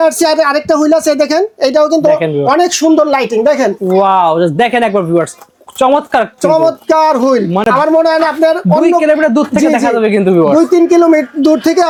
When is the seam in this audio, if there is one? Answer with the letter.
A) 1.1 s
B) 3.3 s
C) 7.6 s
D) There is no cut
D